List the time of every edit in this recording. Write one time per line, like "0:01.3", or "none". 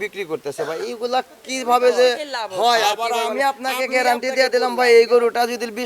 0:03.0